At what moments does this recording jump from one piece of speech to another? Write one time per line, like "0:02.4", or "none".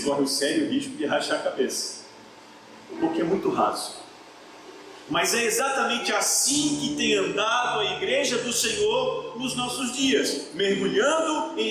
none